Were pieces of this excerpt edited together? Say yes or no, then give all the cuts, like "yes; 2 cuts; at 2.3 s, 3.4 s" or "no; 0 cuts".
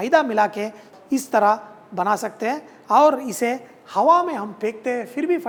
no; 0 cuts